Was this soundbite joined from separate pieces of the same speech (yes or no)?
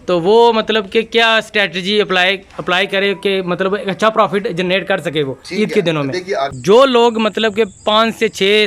yes